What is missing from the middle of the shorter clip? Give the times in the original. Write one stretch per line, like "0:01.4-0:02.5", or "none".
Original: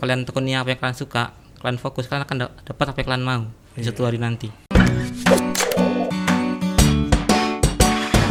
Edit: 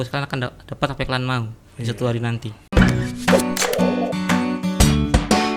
none